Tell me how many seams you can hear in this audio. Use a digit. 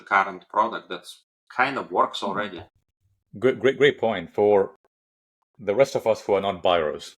0